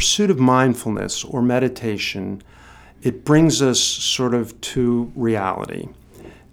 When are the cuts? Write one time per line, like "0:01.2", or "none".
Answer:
none